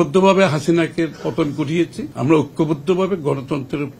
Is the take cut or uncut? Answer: cut